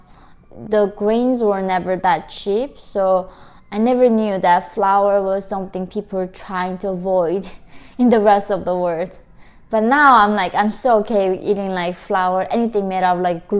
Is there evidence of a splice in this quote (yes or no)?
no